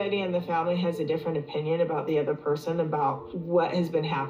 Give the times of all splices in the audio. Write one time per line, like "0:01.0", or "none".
none